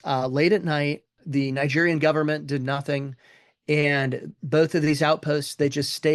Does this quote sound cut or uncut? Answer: uncut